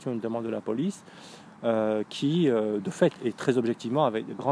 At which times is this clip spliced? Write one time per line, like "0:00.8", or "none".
none